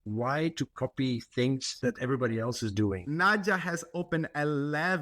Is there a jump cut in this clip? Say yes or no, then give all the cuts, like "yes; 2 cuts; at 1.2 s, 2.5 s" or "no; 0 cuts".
yes; 2 cuts; at 1.7 s, 3.0 s